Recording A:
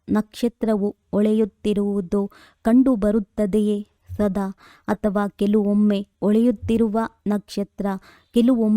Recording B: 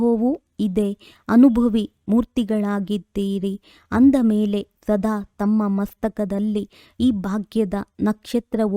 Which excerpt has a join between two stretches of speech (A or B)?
A